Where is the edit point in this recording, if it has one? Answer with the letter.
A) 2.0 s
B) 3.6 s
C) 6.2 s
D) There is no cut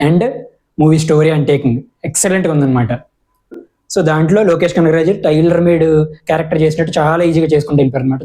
B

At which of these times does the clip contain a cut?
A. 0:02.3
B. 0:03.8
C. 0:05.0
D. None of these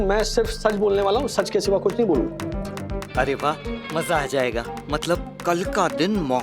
A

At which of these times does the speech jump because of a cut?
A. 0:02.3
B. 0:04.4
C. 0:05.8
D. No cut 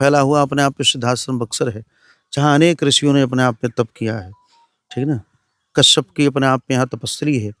D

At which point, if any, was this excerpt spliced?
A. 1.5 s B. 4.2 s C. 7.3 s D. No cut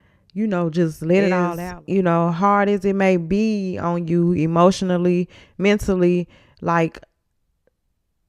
A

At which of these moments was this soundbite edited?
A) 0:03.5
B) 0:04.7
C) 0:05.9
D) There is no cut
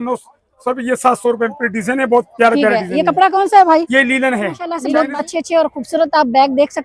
B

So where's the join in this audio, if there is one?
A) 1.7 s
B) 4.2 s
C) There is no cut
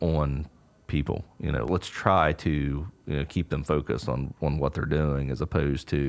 A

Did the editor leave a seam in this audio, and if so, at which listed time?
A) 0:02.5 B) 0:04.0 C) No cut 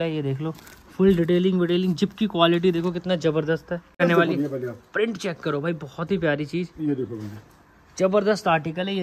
B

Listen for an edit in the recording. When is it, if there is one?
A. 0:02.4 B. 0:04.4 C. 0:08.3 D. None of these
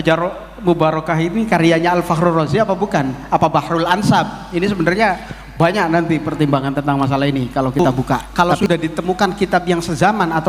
C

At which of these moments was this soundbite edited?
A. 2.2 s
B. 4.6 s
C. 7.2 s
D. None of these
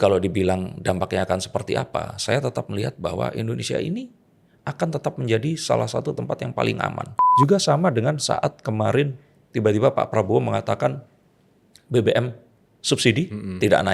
C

